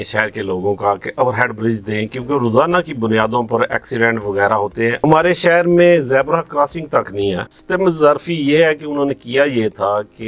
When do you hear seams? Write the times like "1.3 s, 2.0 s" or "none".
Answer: 5.0 s, 7.5 s